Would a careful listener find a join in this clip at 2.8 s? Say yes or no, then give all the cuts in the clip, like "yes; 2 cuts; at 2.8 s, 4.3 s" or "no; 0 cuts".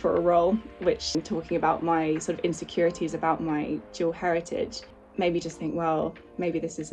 no; 2 cuts; at 1.1 s, 5.0 s